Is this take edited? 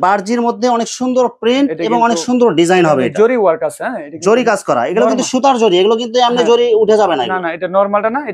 no; 0 cuts

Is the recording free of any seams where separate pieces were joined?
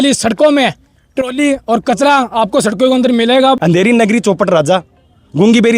no; 1 cut; at 3.6 s

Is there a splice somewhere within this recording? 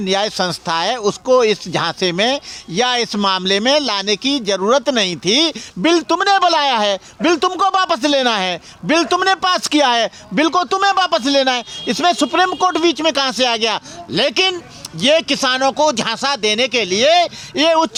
no; 0 cuts

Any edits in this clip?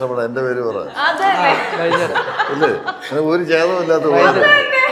no; 0 cuts

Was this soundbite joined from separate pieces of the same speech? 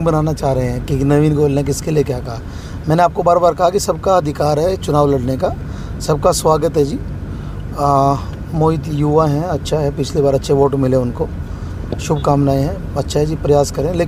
no; 0 cuts

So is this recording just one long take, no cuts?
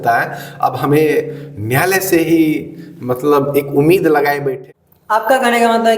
no; 1 cut; at 4.5 s

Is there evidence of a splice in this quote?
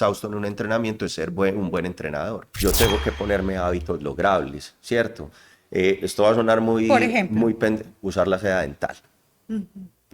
yes; 1 cut; at 2.5 s

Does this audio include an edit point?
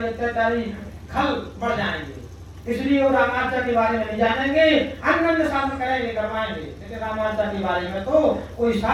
no; 0 cuts

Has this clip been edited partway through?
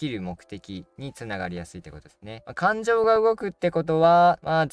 yes; 1 cut; at 2.3 s

